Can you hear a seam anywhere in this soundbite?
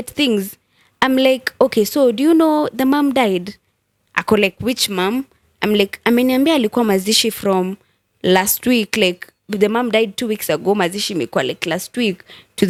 no; 0 cuts

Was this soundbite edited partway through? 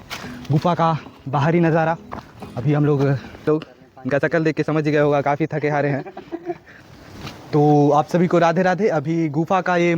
yes; 2 cuts; at 3.5 s, 6.8 s

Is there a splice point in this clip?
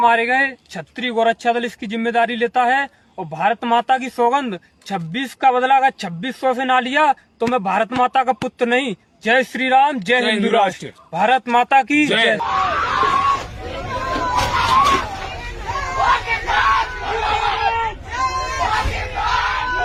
no; 0 cuts

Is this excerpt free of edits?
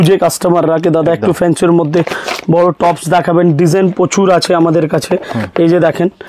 yes; 0 cuts

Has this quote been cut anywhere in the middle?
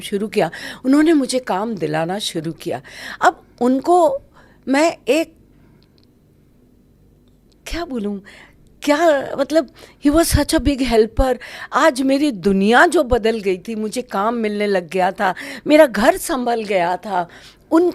no; 0 cuts

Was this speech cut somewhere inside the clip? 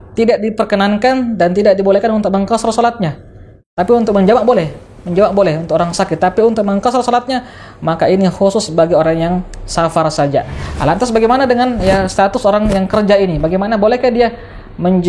yes; 1 cut; at 10.6 s

